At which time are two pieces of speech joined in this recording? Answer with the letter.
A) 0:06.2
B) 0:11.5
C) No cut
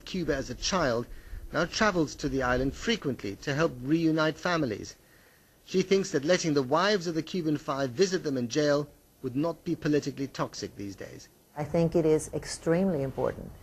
C